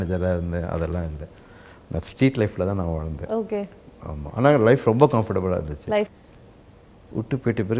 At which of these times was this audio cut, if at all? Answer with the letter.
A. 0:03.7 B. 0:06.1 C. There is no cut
B